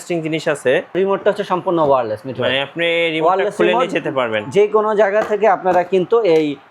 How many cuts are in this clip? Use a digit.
1